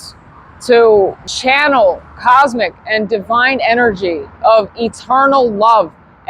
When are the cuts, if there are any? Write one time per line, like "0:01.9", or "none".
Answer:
0:01.2